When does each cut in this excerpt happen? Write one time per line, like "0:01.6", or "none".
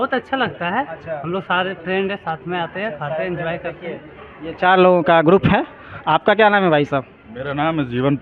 none